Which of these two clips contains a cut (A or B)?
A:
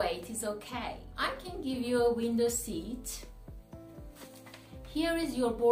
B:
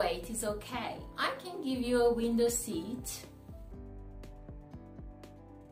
A